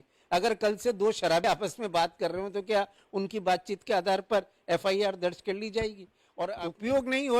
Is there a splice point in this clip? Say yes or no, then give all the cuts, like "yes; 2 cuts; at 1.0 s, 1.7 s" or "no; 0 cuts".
yes; 2 cuts; at 1.4 s, 6.5 s